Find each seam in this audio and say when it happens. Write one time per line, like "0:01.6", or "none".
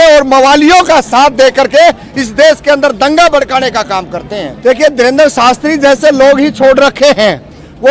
0:04.5